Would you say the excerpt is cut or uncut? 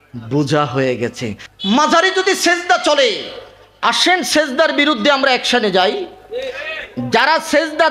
cut